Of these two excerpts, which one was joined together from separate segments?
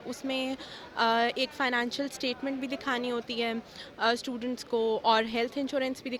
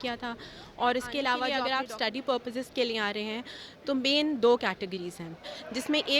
second; 1 cut; at 1.5 s

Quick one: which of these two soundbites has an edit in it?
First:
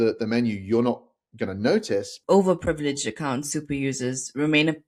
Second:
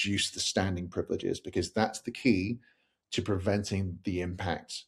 first; 1 cut; at 2.2 s

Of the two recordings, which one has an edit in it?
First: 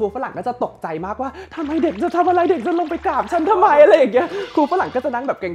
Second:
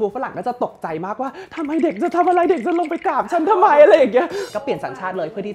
second; 1 cut; at 4.4 s

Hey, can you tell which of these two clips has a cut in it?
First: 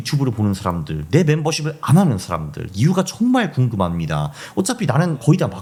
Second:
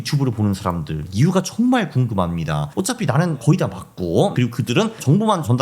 second; 3 cuts; at 0.9 s, 2.6 s, 4.7 s

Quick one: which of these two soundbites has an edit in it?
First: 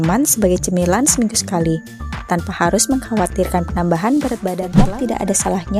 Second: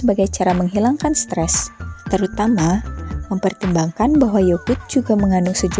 first; 1 cut; at 4.8 s

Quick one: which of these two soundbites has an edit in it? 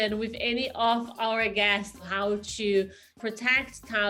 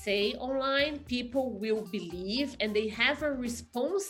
first; 2 cuts; at 2.0 s, 3.2 s

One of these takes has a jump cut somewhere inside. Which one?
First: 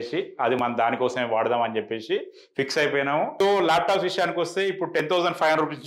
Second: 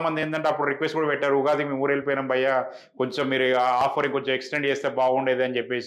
first; 1 cut; at 3.3 s

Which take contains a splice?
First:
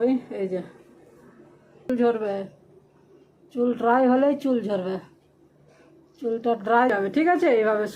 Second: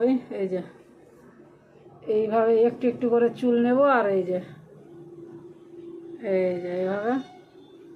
first; 2 cuts; at 1.9 s, 6.9 s

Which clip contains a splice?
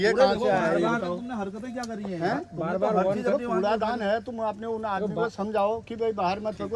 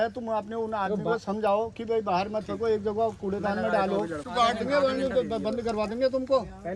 second; 1 cut; at 4.3 s

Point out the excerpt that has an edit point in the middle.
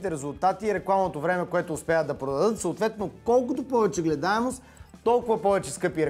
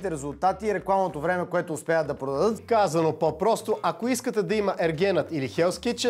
second; 1 cut; at 2.6 s

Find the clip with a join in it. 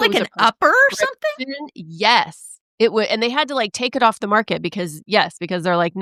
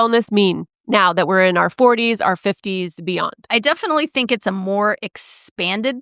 second; 1 cut; at 3.5 s

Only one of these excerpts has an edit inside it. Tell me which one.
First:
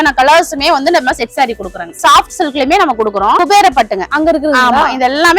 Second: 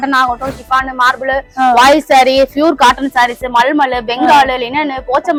first; 2 cuts; at 2.0 s, 3.4 s

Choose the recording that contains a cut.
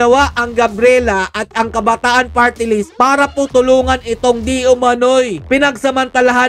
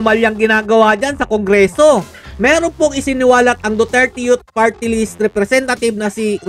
second; 1 cut; at 2.3 s

